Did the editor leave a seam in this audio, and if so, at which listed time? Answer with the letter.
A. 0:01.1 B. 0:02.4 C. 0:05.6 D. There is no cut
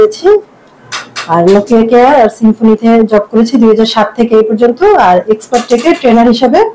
D